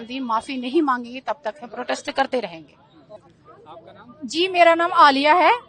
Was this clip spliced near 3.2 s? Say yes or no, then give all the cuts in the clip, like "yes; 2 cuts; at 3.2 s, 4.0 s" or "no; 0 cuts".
yes; 1 cut; at 3.2 s